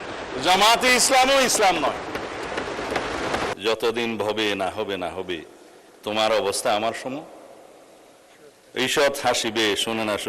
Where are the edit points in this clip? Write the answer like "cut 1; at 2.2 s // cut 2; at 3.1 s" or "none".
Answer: cut 1; at 3.5 s